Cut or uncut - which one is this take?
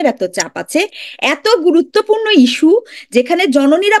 uncut